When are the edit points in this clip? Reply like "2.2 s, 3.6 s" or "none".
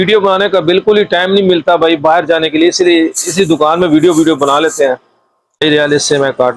5.6 s

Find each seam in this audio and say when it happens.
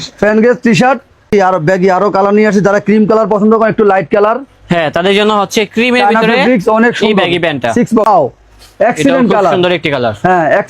1.2 s, 8.1 s

